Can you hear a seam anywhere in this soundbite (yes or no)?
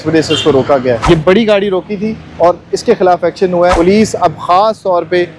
yes